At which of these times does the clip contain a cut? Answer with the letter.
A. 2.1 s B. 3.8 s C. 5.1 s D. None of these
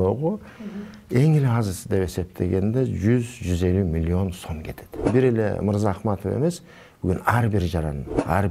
C